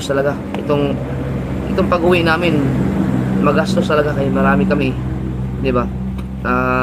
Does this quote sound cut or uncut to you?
uncut